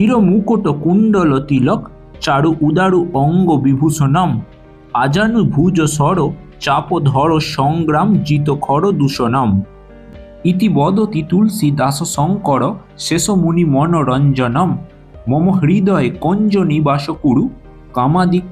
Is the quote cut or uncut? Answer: cut